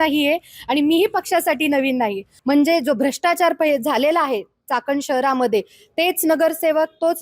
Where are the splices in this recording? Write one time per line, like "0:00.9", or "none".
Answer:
0:02.3